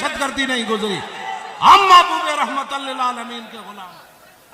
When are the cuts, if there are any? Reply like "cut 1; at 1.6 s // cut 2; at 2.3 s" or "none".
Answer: cut 1; at 3.6 s